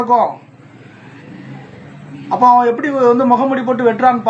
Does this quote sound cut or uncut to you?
uncut